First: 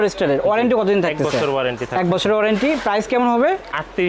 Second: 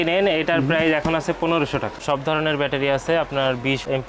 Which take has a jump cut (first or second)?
second